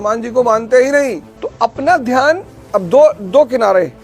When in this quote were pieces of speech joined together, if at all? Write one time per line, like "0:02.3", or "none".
0:01.3